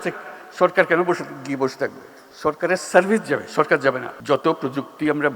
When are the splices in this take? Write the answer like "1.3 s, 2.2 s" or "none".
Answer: 4.1 s